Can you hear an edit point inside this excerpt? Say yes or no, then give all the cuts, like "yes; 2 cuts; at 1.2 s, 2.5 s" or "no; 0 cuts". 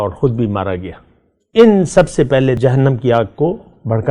yes; 1 cut; at 2.6 s